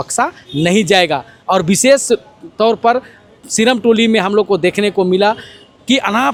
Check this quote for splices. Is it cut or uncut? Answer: uncut